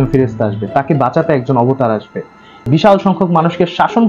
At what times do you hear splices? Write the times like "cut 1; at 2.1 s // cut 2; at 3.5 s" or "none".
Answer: cut 1; at 2.6 s